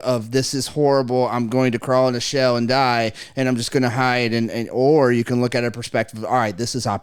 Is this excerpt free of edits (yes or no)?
yes